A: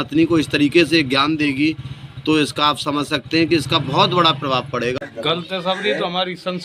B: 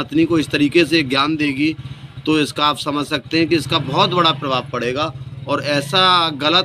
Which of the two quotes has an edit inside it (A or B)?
A